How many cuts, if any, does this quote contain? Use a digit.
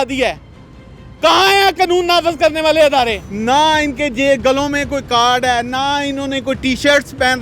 1